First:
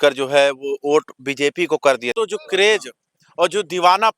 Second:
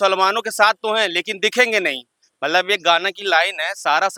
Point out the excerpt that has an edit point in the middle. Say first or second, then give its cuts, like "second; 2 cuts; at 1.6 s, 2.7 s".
first; 1 cut; at 2.1 s